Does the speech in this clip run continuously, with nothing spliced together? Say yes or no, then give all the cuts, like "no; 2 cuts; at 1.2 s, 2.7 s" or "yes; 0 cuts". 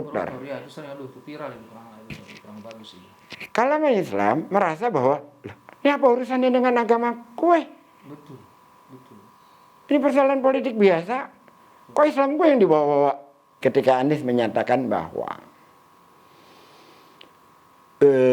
no; 1 cut; at 13.5 s